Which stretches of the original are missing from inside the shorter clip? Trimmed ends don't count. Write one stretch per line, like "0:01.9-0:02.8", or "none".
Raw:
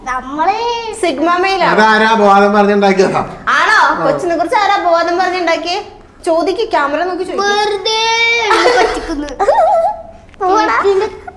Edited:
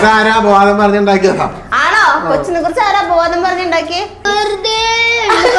0:06.0-0:07.5